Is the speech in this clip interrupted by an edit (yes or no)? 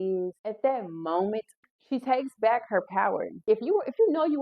yes